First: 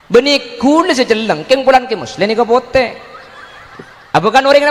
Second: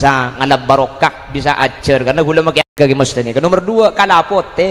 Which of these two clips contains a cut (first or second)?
second